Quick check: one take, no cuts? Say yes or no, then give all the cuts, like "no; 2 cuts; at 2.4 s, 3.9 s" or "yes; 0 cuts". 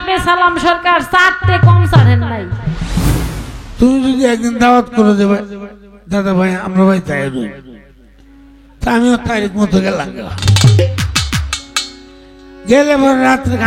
no; 1 cut; at 3.1 s